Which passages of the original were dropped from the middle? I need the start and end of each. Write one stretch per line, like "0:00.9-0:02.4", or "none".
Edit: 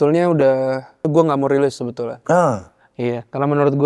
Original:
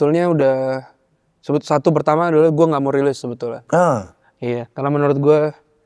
0:01.1-0:02.5